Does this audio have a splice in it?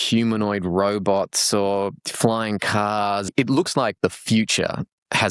yes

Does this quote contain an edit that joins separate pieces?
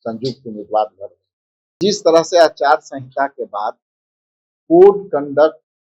yes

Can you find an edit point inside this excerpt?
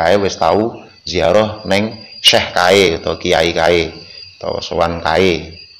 no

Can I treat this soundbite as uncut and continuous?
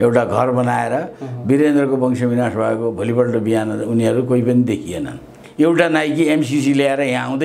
no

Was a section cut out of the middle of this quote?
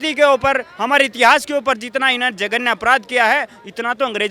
no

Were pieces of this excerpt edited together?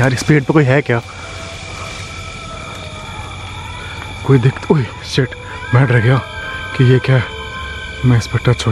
no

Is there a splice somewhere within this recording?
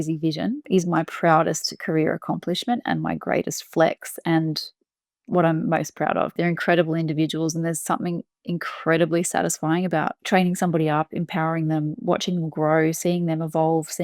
yes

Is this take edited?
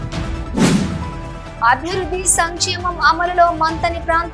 yes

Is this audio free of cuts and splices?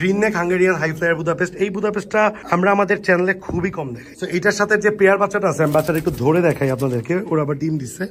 no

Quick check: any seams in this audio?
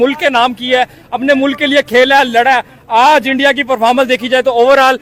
no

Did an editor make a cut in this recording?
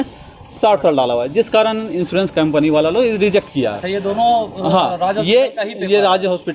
no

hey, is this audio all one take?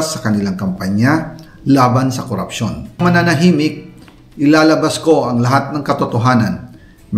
no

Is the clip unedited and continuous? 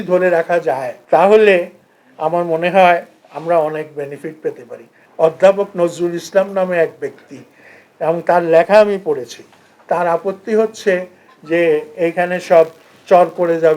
no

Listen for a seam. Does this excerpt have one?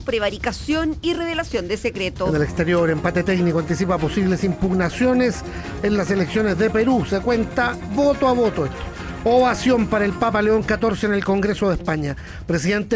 no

